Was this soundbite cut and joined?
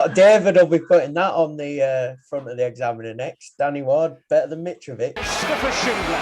yes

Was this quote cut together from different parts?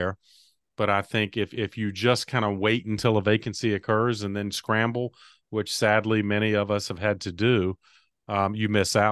no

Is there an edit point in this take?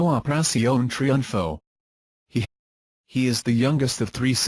no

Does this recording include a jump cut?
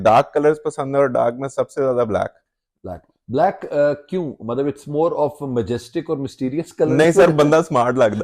no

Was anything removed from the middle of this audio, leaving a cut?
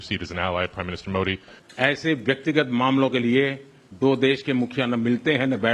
yes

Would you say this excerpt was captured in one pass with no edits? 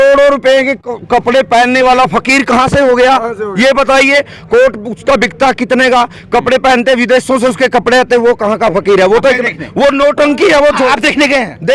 yes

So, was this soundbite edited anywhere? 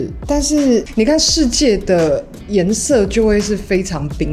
no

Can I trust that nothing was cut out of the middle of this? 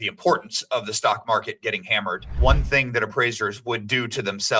no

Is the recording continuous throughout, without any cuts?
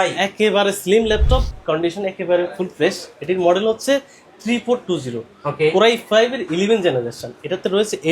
no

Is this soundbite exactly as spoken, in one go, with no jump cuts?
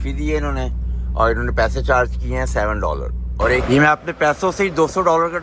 no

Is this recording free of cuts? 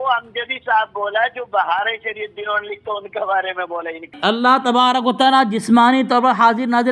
no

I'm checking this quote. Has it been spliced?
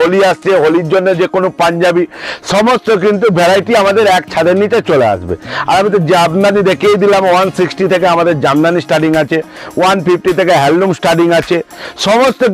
no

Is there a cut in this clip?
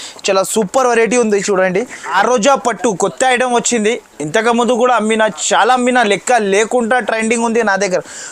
yes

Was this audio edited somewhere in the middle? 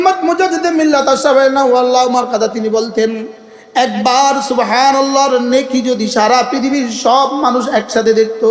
no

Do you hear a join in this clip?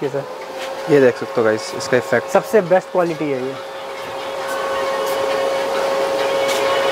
no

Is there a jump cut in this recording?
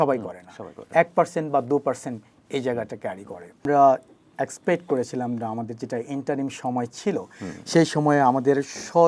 yes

